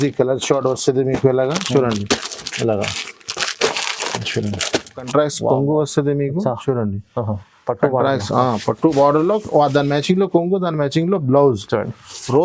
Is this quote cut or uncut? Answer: cut